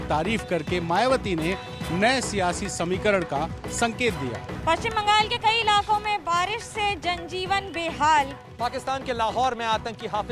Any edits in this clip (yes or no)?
yes